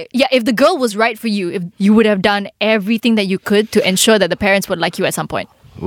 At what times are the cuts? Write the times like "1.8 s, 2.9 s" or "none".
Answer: 1.6 s